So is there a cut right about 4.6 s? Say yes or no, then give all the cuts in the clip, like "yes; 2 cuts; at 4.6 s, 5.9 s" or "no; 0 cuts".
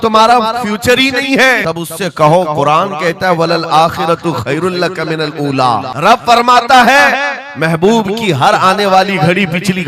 no; 2 cuts; at 1.6 s, 5.9 s